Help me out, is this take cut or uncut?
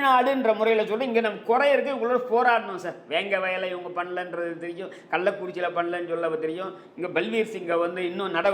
uncut